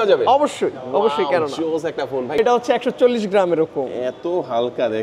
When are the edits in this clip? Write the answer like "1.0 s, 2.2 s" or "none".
2.4 s